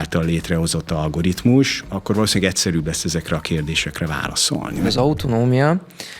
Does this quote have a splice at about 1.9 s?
yes; 2 cuts; at 1.9 s, 4.9 s

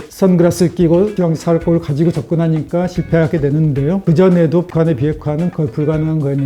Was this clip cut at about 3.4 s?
no; 0 cuts

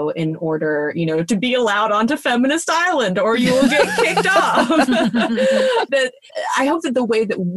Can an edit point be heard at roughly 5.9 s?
yes; 1 cut; at 5.9 s

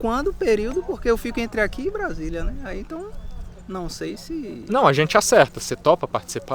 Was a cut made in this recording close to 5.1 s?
no; 0 cuts

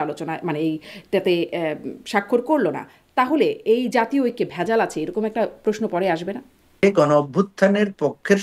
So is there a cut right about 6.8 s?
yes; 1 cut; at 6.8 s

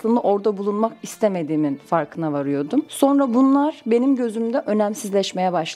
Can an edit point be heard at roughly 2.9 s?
yes; 1 cut; at 2.9 s

